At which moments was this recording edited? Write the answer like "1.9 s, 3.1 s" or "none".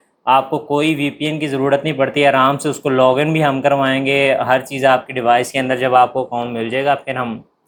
none